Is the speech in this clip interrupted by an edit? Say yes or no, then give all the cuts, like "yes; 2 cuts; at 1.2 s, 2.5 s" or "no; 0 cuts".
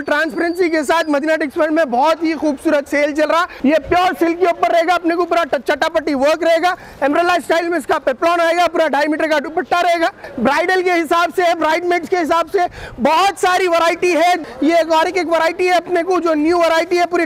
yes; 3 cuts; at 3.5 s, 10.2 s, 14.4 s